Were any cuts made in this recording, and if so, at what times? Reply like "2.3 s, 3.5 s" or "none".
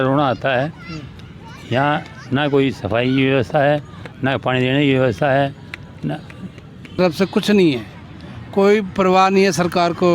7.0 s

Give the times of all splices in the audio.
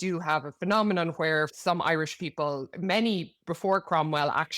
1.5 s, 2.7 s

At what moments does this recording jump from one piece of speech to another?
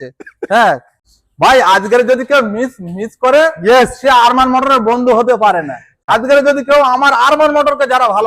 1.1 s, 6.1 s

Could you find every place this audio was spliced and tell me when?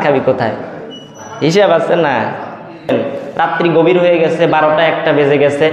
2.9 s

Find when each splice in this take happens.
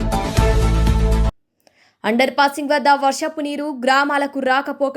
none

